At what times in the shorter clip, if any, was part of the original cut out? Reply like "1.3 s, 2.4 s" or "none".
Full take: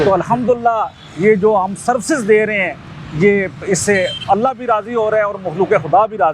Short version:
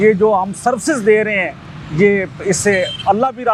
none